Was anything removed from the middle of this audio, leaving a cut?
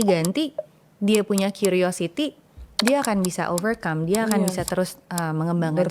no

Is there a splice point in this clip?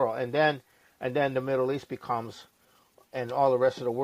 no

